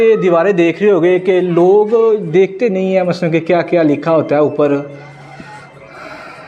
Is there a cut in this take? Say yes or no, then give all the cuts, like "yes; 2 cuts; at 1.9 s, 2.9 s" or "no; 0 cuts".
no; 0 cuts